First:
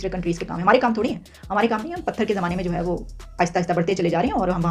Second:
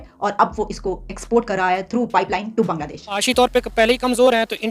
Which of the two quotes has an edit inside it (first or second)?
second